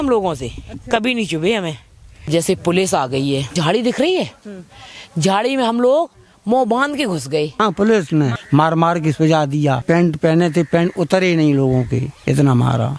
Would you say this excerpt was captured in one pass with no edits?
no; 5 cuts; at 2.3 s, 3.5 s, 7.6 s, 8.4 s, 9.8 s

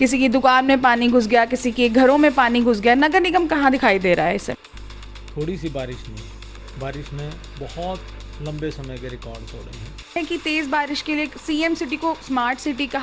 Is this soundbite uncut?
no; 2 cuts; at 4.6 s, 10.2 s

